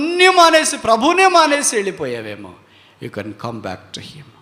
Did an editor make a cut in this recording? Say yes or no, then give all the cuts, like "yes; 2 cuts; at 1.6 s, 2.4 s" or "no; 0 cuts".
no; 0 cuts